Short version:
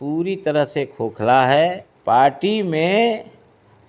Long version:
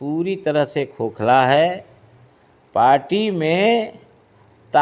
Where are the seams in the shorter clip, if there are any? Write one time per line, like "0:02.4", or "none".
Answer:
0:01.9